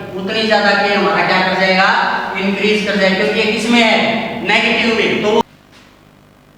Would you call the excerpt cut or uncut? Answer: cut